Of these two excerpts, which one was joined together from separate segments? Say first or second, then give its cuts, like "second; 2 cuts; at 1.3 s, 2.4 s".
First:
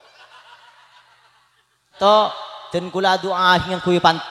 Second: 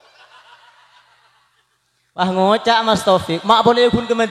first; 1 cut; at 1.9 s